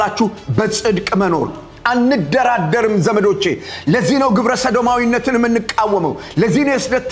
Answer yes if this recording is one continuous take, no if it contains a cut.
no